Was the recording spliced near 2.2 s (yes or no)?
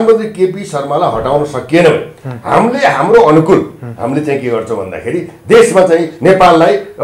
no